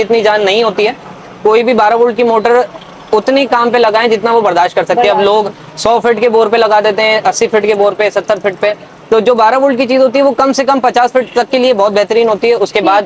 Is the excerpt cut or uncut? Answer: uncut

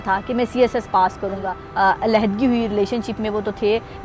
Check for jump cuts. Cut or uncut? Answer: cut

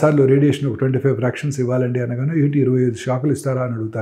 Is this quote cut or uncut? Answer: uncut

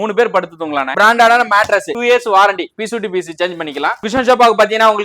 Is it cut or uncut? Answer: cut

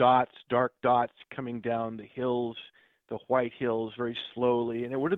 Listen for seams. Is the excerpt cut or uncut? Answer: uncut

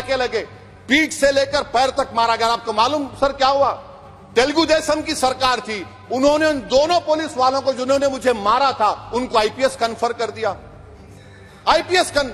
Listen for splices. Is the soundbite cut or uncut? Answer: uncut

